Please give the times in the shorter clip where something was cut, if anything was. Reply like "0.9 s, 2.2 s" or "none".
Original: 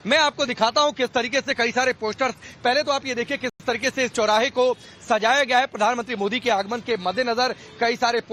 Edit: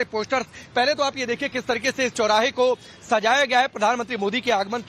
1.6 s